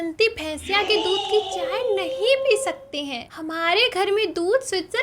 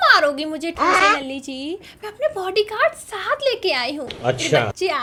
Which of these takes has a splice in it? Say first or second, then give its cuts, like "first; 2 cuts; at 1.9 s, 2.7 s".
first; 1 cut; at 3.4 s